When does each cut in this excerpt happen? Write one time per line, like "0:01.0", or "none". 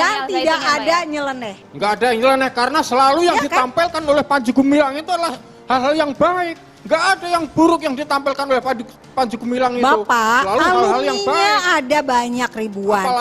0:01.6